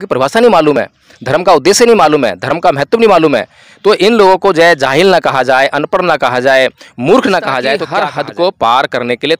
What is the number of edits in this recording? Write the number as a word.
one